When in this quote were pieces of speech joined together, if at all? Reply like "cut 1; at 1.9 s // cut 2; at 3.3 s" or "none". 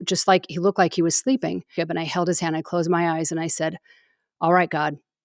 cut 1; at 1.7 s